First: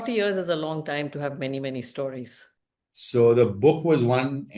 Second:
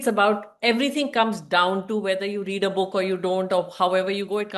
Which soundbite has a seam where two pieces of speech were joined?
first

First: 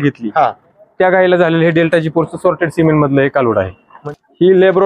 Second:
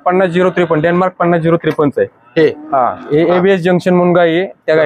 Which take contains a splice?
first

